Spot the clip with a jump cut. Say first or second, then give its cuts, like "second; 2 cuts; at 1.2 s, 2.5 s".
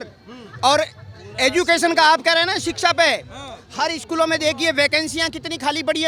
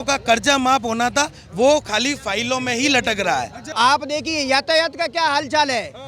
second; 1 cut; at 3.6 s